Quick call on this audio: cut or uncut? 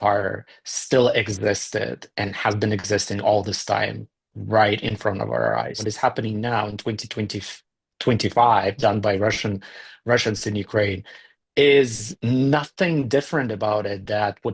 cut